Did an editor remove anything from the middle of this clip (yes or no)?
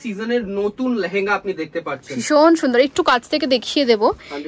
no